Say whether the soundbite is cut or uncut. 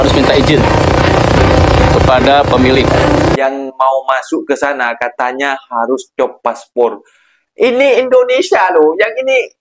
cut